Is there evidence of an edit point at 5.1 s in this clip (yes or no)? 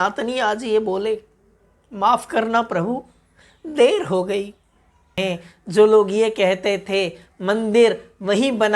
yes